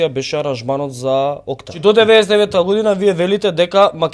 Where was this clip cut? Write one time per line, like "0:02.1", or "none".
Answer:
0:01.8